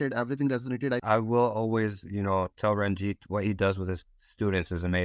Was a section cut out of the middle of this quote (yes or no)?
yes